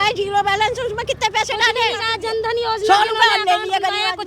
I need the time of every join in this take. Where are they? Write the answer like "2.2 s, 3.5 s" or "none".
none